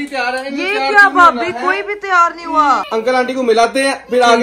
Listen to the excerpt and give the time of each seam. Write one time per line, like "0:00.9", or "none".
0:02.8